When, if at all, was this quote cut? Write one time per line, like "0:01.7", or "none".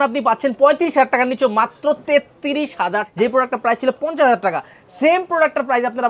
0:03.1